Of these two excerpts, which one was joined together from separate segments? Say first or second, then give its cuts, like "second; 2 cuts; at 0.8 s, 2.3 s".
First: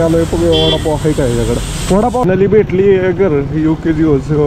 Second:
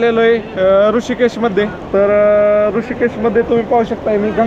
first; 1 cut; at 2.2 s